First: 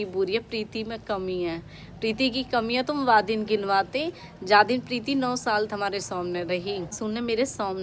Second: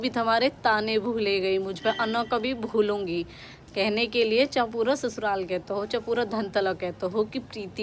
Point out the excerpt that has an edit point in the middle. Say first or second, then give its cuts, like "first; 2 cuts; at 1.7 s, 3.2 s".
first; 1 cut; at 6.9 s